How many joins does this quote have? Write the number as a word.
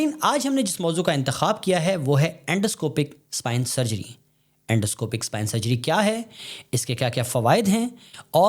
zero